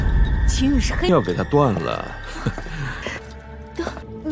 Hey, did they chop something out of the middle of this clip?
no; 0 cuts

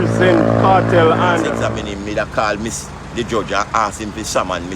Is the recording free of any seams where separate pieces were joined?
no; 1 cut; at 1.6 s

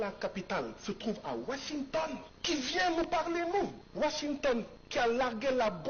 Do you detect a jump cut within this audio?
yes; 3 cuts; at 2.3 s, 3.8 s, 4.8 s

